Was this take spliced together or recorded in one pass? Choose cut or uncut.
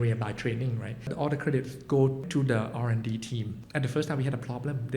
cut